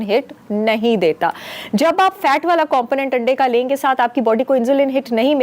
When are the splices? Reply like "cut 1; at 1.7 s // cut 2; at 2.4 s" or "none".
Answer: none